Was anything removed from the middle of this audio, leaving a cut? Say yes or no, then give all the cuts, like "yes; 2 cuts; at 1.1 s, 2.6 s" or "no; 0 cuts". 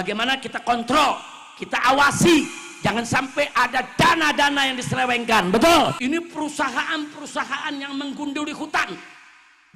yes; 1 cut; at 6.0 s